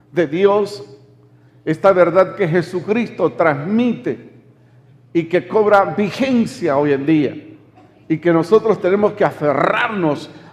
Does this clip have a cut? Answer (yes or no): yes